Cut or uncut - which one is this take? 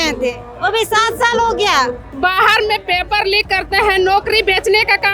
cut